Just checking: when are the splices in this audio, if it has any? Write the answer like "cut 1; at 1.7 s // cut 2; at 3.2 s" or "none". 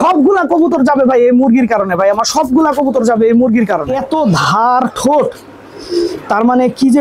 cut 1; at 3.9 s